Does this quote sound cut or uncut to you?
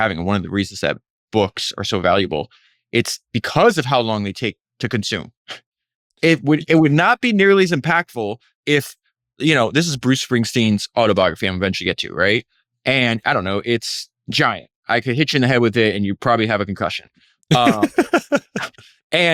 uncut